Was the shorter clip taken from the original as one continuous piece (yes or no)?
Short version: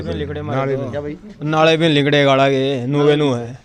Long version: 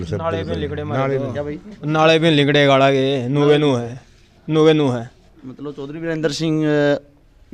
yes